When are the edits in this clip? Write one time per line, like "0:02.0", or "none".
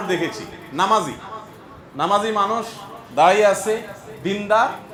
none